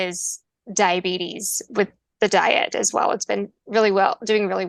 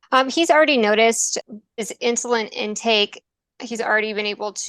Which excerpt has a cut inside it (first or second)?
second